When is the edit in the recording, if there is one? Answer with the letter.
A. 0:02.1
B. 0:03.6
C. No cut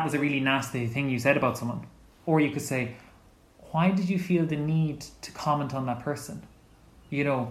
A